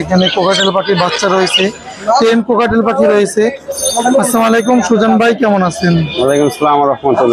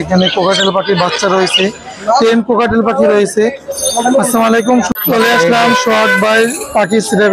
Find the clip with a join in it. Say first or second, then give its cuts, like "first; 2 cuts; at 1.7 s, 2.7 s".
second; 1 cut; at 4.9 s